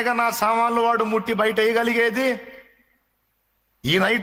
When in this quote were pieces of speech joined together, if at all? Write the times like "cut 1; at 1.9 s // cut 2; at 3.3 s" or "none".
none